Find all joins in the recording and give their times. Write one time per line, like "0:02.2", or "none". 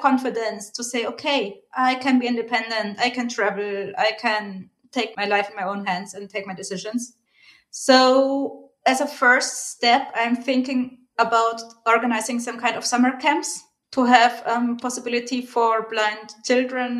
0:13.7